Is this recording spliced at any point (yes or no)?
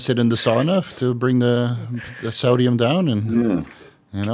no